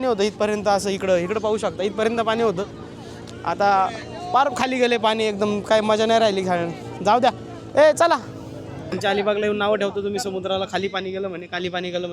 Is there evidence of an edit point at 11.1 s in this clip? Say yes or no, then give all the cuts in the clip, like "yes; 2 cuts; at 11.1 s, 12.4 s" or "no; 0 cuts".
no; 1 cut; at 8.8 s